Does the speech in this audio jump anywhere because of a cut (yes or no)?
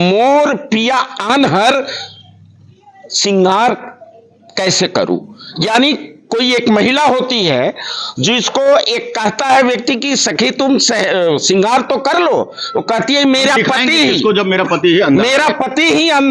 no